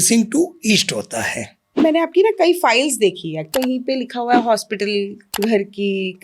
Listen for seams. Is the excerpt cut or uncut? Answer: cut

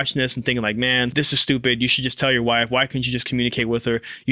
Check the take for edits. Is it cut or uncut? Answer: cut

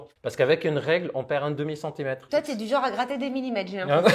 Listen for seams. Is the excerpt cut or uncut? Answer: cut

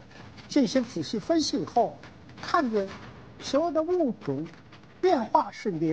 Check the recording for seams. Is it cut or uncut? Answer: uncut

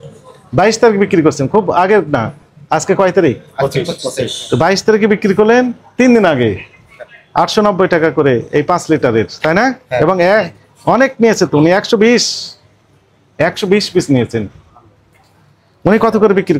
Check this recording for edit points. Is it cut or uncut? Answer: uncut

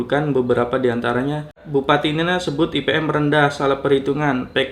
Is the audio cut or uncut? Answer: cut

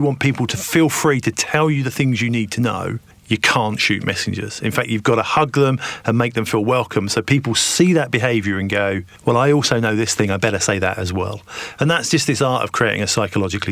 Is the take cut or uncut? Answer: cut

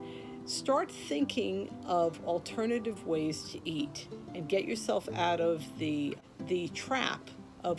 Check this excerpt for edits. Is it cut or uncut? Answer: cut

